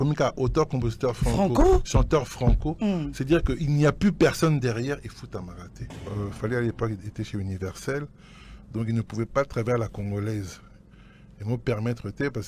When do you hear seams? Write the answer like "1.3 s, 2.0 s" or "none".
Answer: 6.1 s

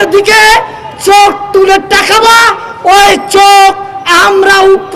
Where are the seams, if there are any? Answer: none

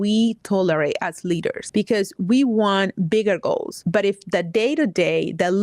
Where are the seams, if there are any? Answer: 1.6 s, 3.7 s

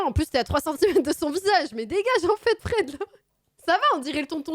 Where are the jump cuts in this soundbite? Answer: 3.5 s

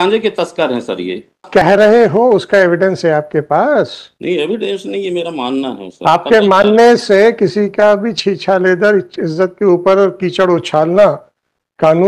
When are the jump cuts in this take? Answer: 1.4 s

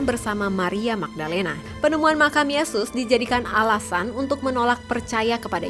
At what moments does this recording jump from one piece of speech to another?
1.6 s

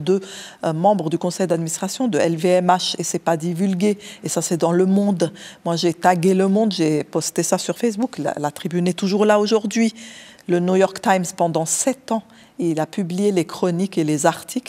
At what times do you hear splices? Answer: none

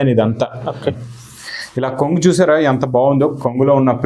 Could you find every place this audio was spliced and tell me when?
0.9 s

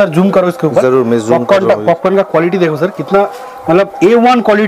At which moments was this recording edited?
none

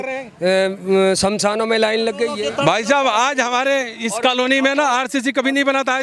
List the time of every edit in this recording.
2.3 s

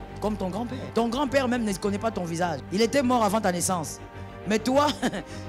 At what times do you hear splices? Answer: 0.8 s, 2.6 s

